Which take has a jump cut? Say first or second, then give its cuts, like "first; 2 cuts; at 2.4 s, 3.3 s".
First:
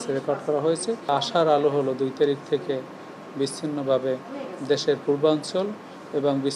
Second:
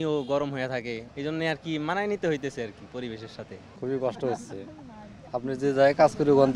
second; 2 cuts; at 1.1 s, 3.6 s